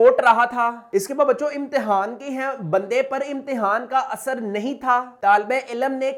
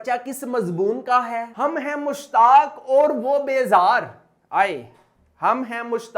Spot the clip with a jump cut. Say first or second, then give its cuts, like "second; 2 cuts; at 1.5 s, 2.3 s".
second; 1 cut; at 1.5 s